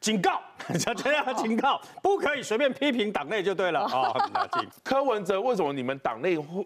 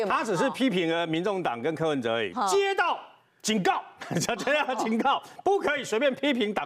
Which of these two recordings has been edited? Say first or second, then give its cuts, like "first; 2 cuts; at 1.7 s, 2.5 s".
first; 1 cut; at 4.7 s